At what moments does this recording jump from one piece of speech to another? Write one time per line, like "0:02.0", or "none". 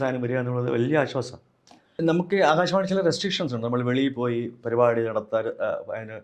0:02.0